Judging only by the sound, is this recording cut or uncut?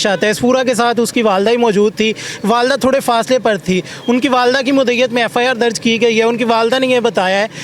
uncut